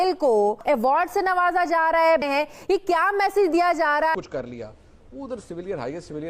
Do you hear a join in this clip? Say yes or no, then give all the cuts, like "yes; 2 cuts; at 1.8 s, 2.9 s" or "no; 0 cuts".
yes; 1 cut; at 4.2 s